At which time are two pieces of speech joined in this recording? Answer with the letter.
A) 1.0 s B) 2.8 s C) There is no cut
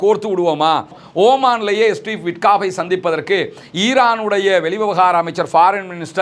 A